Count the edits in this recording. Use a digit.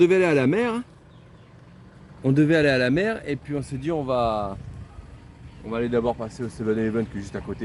0